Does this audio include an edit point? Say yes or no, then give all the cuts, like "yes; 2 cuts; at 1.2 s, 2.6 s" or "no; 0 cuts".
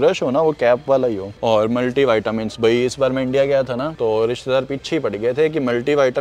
no; 0 cuts